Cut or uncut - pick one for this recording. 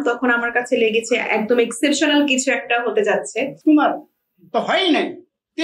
cut